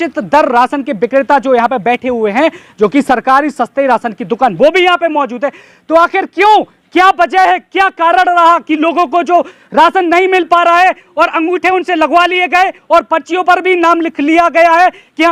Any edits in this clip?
no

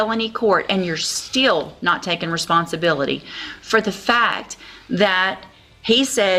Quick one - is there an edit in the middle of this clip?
no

